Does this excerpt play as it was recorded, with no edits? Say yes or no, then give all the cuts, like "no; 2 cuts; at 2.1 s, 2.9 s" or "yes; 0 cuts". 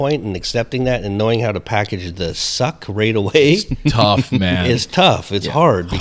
yes; 0 cuts